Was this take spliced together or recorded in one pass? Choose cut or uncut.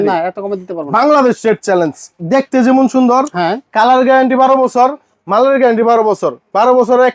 uncut